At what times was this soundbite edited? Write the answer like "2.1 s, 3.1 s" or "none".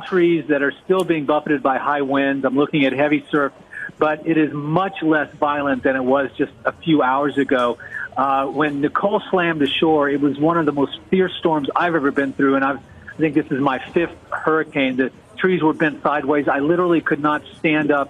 9.9 s